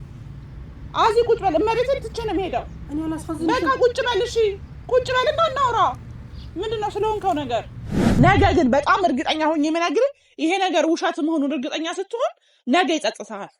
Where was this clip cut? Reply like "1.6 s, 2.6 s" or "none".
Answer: 8.2 s